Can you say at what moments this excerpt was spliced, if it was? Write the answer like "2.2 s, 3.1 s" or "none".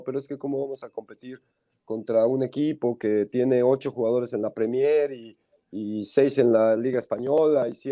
none